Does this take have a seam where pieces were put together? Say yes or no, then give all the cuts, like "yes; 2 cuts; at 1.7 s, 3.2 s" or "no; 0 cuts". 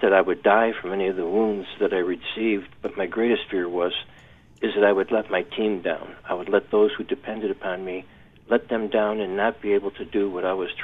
no; 0 cuts